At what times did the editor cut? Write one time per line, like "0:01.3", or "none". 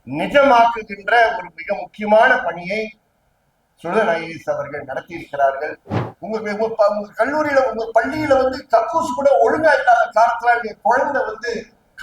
0:05.9